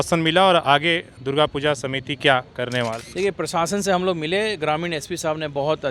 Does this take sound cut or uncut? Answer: cut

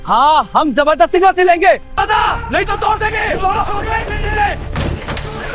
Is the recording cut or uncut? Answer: uncut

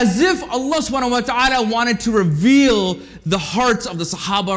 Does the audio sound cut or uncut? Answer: uncut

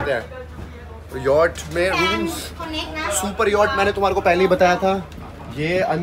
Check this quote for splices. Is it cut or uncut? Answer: uncut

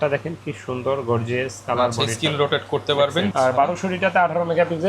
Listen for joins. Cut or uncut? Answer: cut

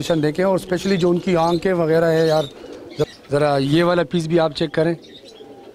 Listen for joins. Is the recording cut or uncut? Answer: cut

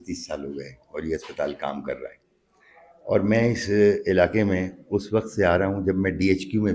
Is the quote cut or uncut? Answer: uncut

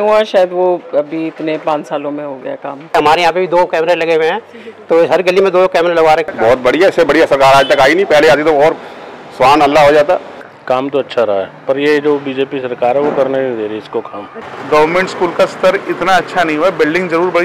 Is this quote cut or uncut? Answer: cut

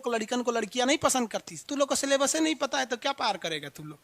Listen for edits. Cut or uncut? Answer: cut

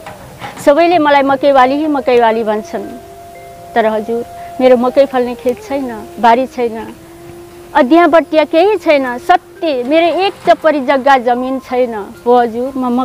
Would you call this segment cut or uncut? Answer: uncut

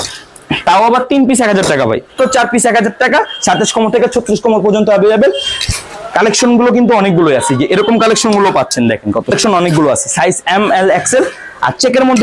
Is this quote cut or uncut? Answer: cut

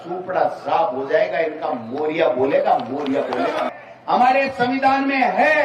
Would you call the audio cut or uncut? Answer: cut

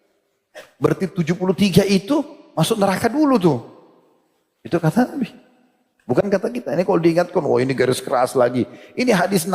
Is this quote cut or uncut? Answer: cut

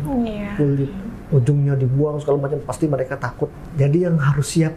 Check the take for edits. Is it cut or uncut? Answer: cut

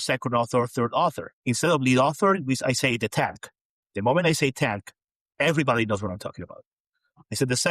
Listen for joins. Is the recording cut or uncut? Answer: cut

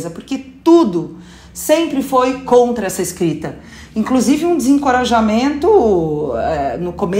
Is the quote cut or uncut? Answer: uncut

